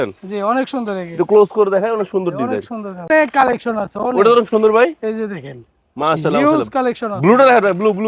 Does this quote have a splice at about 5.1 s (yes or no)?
no